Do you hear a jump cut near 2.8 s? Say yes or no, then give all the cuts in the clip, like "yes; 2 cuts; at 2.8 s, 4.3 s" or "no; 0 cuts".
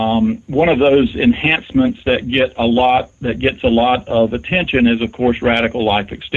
no; 1 cut; at 1.3 s